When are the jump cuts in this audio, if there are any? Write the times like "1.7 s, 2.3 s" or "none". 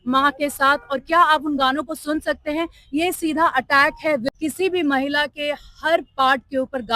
4.3 s